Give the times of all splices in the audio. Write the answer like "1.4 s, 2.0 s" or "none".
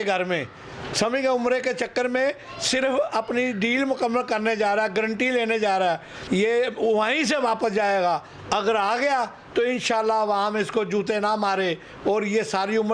6.1 s